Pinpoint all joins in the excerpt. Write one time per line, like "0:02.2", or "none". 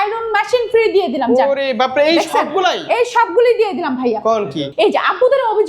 0:04.6